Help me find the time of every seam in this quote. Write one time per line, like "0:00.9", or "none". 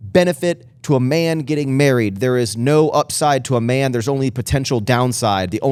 none